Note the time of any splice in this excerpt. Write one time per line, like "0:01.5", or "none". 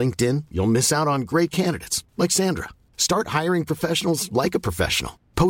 none